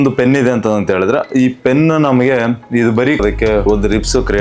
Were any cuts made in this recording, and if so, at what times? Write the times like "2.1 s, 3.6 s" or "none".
3.2 s